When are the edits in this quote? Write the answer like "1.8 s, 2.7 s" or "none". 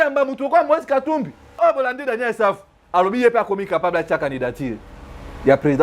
1.6 s